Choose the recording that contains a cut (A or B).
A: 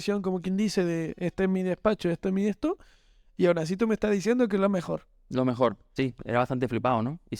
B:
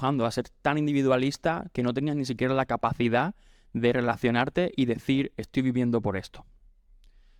A